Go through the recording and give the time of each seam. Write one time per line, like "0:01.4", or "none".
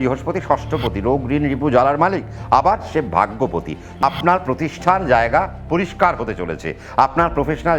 0:04.0